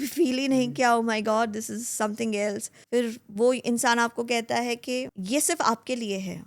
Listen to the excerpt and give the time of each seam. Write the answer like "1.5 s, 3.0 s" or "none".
2.8 s, 5.1 s